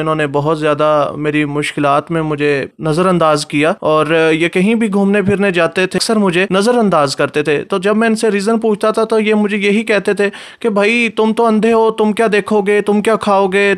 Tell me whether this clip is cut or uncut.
cut